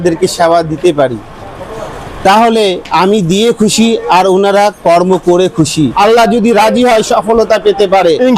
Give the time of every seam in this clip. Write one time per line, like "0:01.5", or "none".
0:05.9